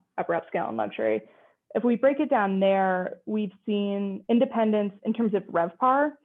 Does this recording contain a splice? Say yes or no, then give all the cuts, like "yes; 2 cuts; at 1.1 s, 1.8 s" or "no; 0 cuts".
yes; 1 cut; at 4.2 s